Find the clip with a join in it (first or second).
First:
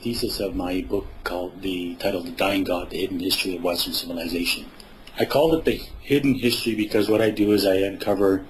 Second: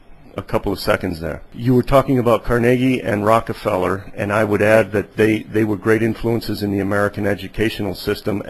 first